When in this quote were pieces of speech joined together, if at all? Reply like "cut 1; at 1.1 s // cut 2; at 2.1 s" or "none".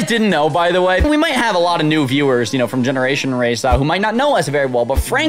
cut 1; at 1.0 s